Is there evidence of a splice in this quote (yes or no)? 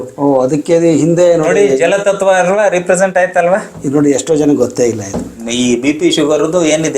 yes